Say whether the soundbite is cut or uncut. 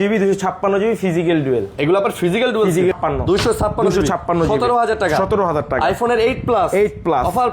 cut